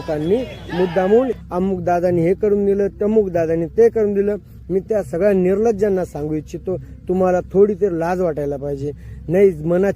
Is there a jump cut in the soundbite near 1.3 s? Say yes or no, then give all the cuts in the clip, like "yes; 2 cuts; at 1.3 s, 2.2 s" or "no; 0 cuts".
yes; 1 cut; at 1.3 s